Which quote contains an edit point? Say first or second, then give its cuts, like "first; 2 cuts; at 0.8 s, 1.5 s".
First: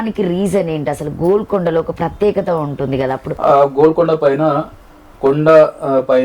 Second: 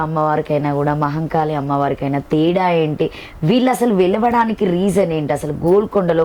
first; 1 cut; at 3.3 s